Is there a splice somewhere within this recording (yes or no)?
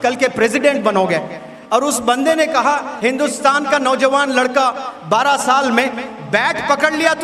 no